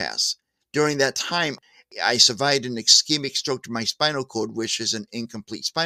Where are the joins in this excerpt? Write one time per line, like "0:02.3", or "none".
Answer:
0:01.6